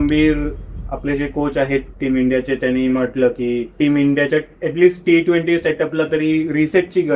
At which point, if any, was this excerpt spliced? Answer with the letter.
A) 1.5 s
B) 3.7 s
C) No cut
B